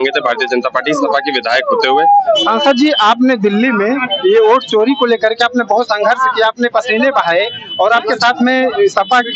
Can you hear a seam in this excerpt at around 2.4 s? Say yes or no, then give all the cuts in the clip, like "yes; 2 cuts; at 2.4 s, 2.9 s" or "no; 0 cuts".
yes; 1 cut; at 2.4 s